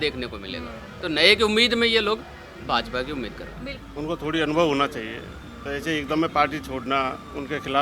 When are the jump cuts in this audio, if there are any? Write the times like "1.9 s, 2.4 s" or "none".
3.8 s